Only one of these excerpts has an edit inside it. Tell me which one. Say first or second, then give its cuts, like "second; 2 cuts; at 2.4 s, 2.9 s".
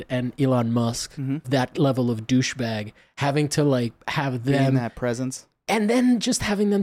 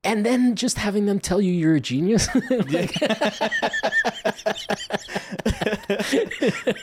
first; 1 cut; at 1.4 s